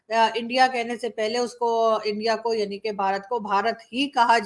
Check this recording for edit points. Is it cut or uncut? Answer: uncut